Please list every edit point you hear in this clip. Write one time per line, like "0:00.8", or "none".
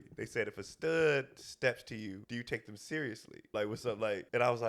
0:02.2
0:03.8